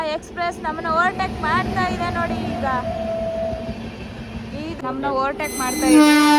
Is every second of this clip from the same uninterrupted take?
no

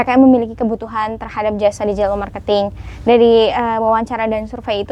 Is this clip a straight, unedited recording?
yes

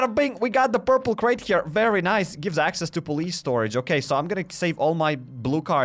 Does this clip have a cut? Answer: no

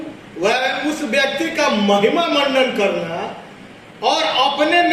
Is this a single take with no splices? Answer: yes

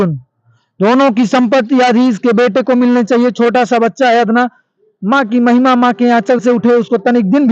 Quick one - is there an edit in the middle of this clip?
no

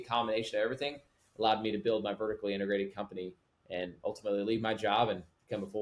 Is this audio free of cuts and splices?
yes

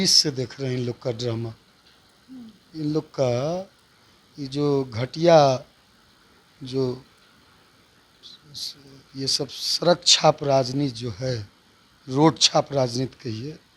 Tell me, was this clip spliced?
no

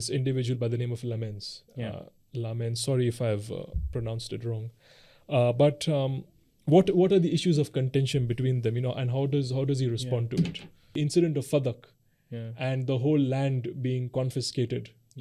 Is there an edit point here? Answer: yes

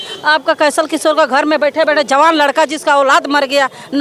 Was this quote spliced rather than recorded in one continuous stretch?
no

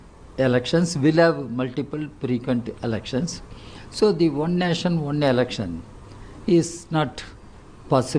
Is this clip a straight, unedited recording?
yes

